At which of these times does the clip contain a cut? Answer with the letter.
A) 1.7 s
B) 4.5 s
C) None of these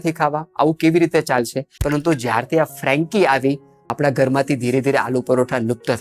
A